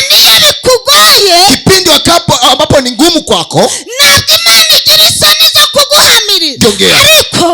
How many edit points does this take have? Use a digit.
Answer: 1